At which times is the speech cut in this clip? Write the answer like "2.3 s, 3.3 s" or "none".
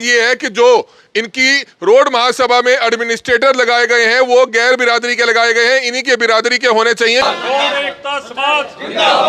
7.2 s